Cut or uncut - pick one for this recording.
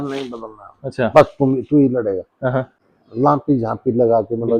cut